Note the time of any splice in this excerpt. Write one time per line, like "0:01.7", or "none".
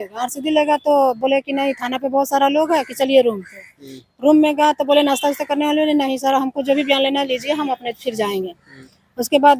none